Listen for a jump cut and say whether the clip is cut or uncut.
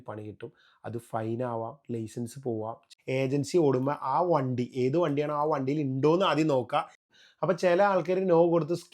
cut